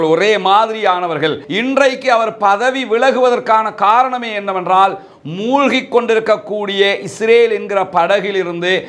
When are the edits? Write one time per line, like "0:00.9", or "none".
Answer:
0:01.4